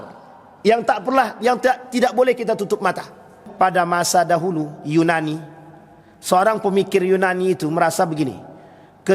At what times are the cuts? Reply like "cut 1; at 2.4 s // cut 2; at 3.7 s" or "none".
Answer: cut 1; at 3.4 s